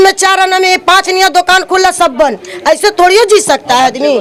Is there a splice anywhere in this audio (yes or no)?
no